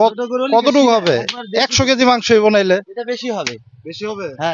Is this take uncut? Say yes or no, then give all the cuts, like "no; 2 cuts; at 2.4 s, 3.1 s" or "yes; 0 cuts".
yes; 0 cuts